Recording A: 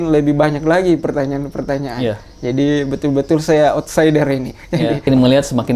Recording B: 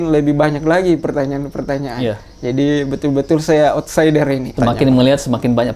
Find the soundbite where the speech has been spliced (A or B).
B